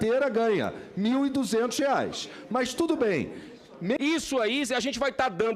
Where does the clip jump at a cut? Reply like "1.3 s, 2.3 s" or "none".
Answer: 4.0 s